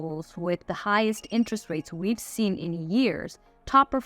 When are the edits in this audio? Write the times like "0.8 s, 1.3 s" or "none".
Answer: none